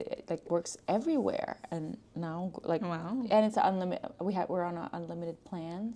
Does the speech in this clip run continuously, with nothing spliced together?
yes; 0 cuts

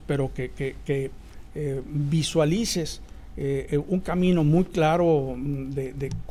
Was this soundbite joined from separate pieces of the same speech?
no; 0 cuts

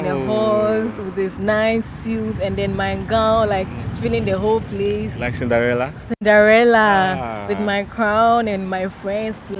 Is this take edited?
yes; 1 cut; at 1.4 s

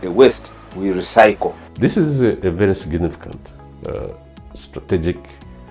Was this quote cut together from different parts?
yes; 1 cut; at 1.6 s

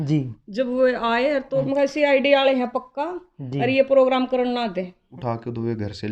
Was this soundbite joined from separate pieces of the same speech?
yes; 2 cuts; at 1.6 s, 5.1 s

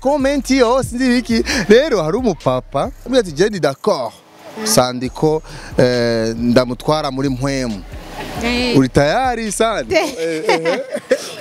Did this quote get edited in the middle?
yes; 2 cuts; at 3.0 s, 9.9 s

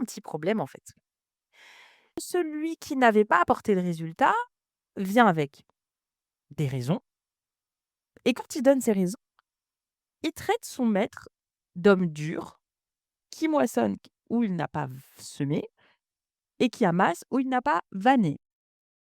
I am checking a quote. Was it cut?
yes; 1 cut; at 2.2 s

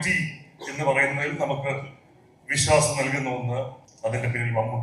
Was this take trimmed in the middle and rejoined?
yes; 1 cut; at 3.8 s

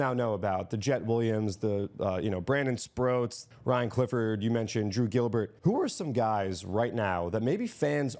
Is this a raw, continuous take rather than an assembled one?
no; 2 cuts; at 3.5 s, 5.5 s

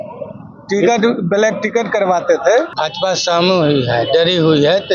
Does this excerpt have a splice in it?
yes; 1 cut; at 2.8 s

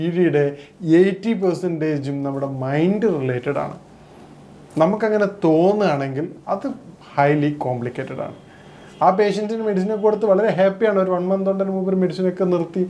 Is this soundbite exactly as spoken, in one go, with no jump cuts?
yes; 0 cuts

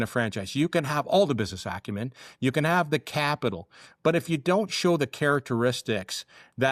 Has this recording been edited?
no; 0 cuts

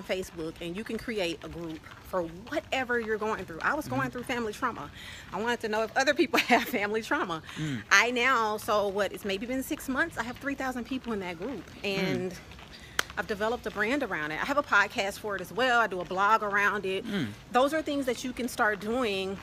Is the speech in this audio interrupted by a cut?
no; 0 cuts

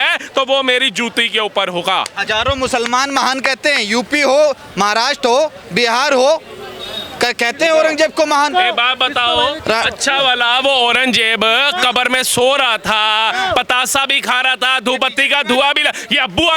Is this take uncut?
yes; 0 cuts

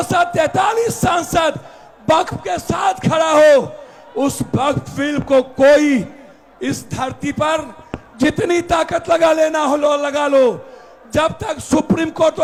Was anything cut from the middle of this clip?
no; 0 cuts

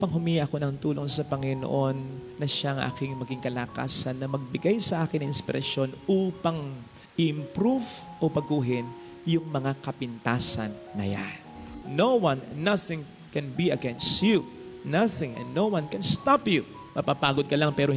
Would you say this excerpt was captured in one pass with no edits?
no; 1 cut; at 11.8 s

